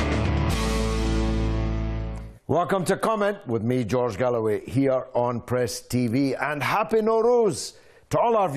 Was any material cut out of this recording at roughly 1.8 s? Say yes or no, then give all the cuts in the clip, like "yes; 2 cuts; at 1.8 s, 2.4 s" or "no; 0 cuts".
yes; 1 cut; at 1.8 s